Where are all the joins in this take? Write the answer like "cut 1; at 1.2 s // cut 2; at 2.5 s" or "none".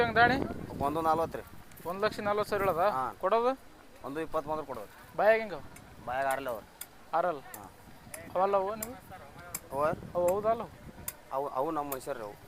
none